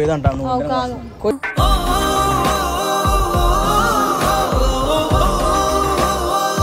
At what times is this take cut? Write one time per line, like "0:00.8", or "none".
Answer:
none